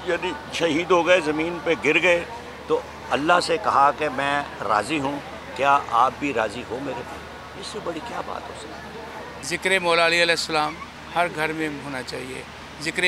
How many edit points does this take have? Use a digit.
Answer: 1